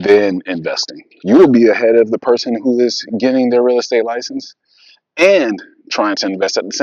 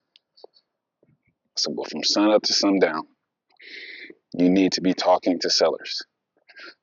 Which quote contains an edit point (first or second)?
second